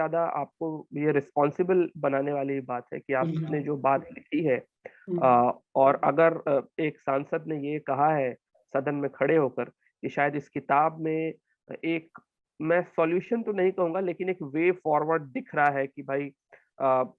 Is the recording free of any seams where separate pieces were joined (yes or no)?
yes